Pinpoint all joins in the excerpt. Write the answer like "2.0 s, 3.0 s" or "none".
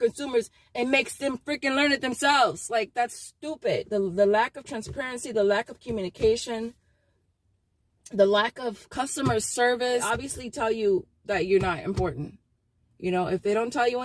3.9 s, 10.0 s